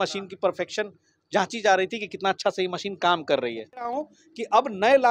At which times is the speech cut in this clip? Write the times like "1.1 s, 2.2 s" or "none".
4.0 s